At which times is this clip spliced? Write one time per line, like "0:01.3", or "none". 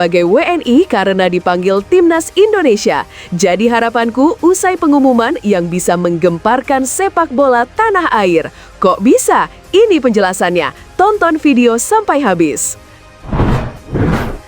0:13.0

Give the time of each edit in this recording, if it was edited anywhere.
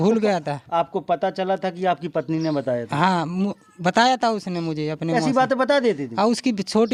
none

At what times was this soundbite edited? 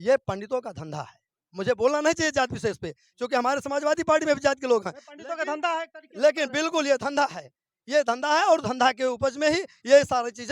none

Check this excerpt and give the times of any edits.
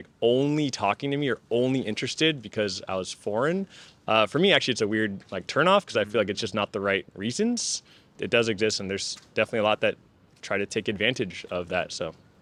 none

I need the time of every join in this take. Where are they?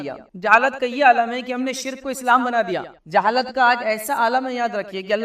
0:02.9

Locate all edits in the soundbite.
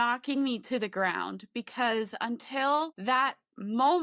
0:02.9

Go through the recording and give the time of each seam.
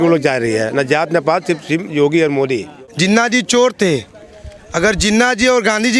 0:02.7

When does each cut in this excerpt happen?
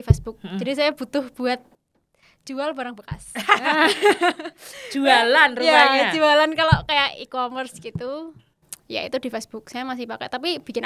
none

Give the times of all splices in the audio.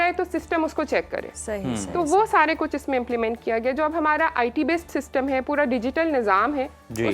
none

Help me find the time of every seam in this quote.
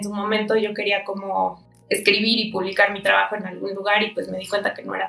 0:01.7

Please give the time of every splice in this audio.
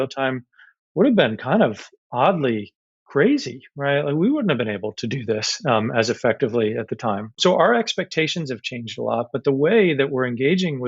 0:07.3

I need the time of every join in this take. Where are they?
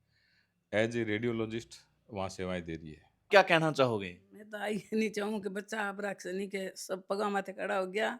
0:03.3

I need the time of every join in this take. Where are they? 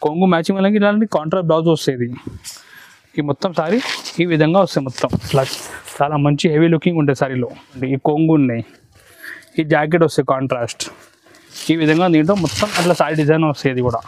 0:07.8

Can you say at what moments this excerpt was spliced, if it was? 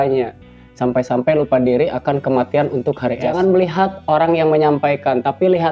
0:03.3

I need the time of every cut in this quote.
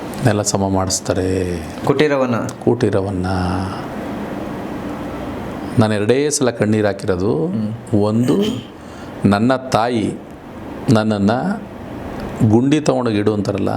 none

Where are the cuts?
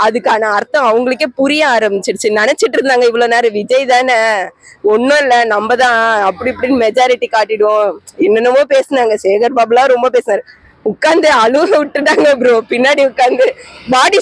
none

